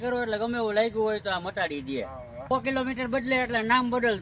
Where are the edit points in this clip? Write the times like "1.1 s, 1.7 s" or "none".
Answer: 2.5 s